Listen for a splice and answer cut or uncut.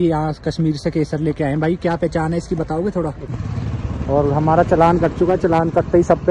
cut